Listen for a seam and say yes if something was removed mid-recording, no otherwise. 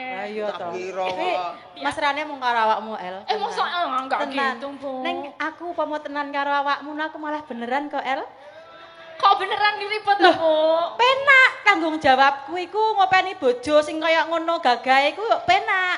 no